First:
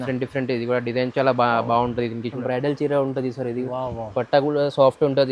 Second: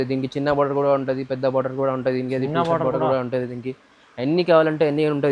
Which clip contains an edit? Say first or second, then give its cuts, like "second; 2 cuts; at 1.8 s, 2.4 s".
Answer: first; 1 cut; at 2.4 s